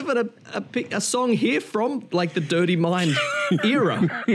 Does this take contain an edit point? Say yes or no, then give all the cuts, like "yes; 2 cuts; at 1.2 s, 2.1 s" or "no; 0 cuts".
no; 0 cuts